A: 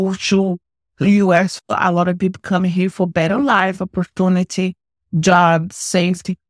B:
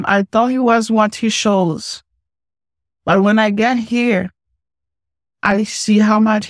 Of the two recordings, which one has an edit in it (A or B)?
A